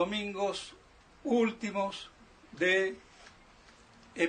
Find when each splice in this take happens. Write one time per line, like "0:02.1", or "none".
0:02.1

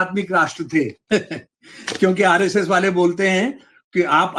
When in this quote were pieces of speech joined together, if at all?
0:01.0

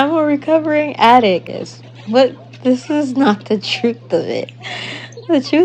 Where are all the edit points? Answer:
0:01.5

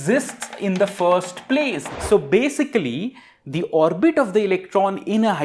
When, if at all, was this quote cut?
0:01.8

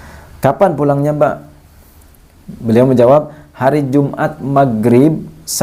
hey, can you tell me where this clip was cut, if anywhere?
none

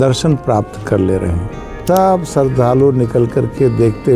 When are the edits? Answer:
0:01.8

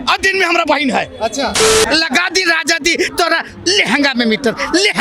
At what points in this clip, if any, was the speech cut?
0:01.7

